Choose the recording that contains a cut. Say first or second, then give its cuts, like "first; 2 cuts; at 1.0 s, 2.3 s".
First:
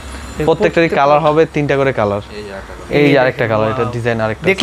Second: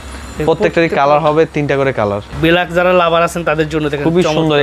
second; 1 cut; at 2.3 s